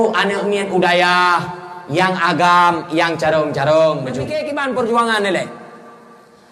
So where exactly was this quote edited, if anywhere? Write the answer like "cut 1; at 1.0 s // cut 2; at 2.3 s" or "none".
cut 1; at 4.3 s